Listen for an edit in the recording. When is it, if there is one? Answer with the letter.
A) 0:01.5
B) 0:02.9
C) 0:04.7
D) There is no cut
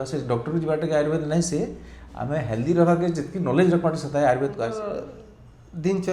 C